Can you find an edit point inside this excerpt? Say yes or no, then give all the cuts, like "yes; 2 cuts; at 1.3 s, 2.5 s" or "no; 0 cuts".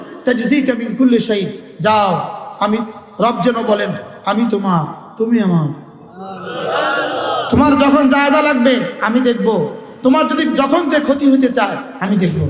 no; 0 cuts